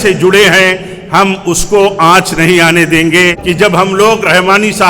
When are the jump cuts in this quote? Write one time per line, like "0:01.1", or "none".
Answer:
0:03.4